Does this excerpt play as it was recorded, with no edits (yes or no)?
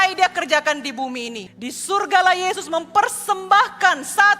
no